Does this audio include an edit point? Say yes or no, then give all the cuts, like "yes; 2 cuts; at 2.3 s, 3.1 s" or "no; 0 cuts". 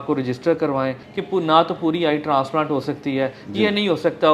yes; 1 cut; at 1.0 s